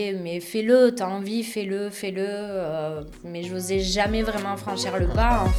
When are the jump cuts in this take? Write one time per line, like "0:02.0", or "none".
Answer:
none